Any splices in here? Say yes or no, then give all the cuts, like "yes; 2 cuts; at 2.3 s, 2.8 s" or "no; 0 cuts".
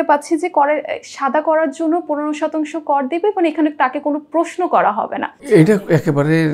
yes; 1 cut; at 5.4 s